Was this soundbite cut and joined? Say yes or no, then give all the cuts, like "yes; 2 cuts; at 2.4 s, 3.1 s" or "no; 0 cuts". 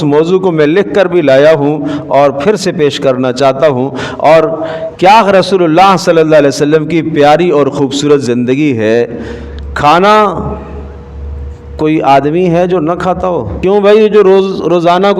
yes; 2 cuts; at 4.8 s, 13.5 s